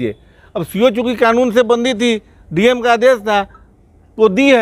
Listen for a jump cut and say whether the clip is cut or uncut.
uncut